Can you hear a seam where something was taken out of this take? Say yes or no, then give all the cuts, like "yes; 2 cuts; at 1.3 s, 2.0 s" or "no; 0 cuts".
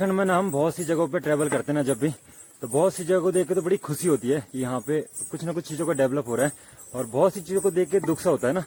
no; 0 cuts